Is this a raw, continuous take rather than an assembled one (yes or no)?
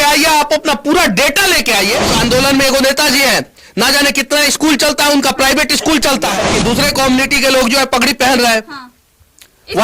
no